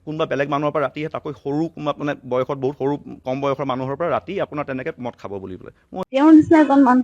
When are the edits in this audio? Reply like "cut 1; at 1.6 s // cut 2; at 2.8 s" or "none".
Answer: cut 1; at 6.0 s